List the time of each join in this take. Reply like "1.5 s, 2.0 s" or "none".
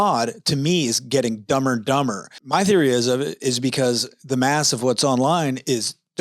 2.3 s